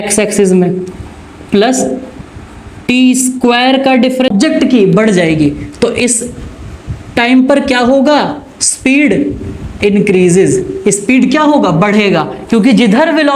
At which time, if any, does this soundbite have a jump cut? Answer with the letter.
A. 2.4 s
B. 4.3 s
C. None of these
B